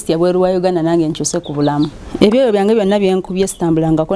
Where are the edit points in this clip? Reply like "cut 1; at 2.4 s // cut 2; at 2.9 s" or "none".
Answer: cut 1; at 2.0 s